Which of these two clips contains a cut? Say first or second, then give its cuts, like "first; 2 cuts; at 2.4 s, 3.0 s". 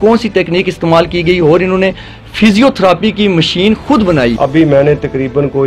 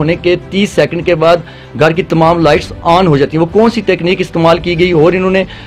first; 1 cut; at 4.4 s